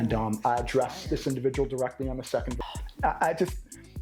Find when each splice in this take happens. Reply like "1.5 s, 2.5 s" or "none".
2.6 s